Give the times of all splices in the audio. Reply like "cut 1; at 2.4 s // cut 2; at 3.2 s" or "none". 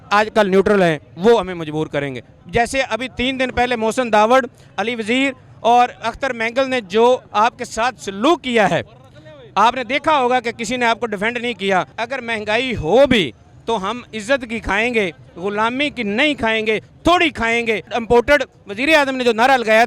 cut 1; at 2.4 s // cut 2; at 11.9 s // cut 3; at 17.9 s